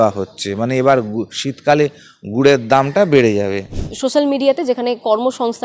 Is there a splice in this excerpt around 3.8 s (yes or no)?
yes